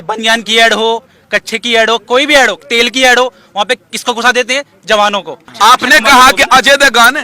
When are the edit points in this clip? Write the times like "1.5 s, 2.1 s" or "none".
5.4 s